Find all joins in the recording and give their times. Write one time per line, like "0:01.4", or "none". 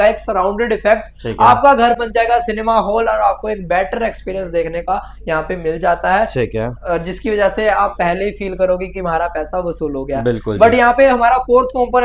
none

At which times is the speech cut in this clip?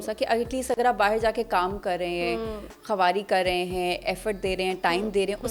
none

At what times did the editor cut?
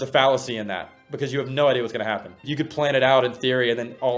0:02.4

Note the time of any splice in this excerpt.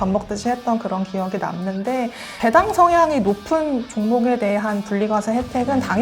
0:02.3

